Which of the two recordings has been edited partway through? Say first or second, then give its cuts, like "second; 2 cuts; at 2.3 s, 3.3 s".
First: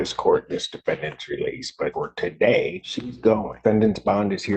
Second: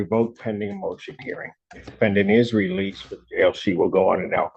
first; 2 cuts; at 1.9 s, 3.4 s